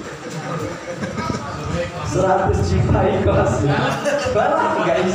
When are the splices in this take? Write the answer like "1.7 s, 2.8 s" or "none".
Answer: none